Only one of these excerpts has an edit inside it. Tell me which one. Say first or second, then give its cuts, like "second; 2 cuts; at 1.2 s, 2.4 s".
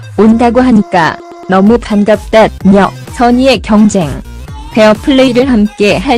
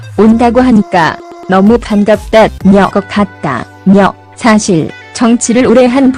first; 1 cut; at 2.9 s